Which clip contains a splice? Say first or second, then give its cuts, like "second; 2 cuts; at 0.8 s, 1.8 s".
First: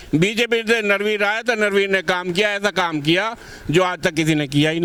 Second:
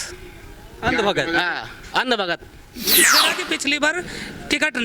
second; 1 cut; at 3.0 s